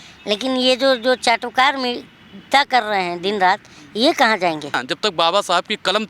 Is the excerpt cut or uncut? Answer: cut